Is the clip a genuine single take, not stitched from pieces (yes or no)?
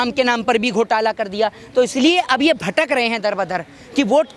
yes